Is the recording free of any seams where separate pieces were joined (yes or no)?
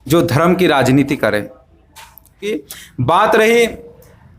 no